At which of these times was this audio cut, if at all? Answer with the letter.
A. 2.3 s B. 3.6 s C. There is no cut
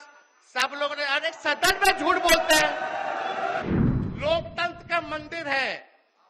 B